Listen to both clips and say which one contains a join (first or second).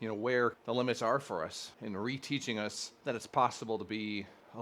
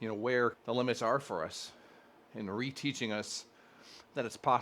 first